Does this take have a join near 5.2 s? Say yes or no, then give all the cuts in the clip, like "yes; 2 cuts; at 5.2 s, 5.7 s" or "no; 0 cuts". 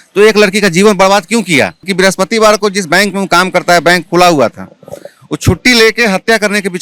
no; 1 cut; at 1.9 s